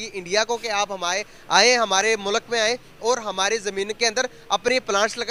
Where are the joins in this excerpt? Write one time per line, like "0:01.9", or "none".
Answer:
none